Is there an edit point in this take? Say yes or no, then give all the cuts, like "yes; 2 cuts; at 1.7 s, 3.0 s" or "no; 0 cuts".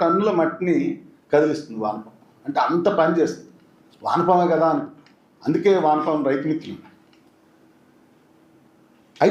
no; 0 cuts